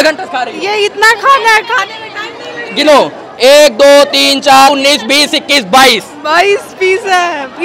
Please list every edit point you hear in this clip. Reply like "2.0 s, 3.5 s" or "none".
4.7 s